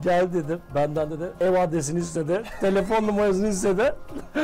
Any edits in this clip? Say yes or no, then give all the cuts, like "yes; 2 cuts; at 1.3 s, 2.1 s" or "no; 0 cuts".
yes; 1 cut; at 1.2 s